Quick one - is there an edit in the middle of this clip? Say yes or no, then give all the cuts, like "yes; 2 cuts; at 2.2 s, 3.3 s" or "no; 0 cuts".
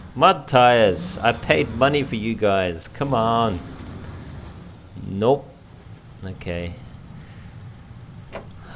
no; 0 cuts